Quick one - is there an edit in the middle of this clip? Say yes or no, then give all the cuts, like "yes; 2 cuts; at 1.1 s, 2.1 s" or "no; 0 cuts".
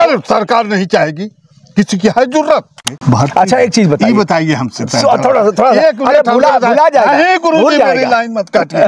yes; 1 cut; at 2.9 s